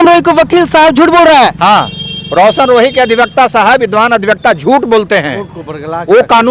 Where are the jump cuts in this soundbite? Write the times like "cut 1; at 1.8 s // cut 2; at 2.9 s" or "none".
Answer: none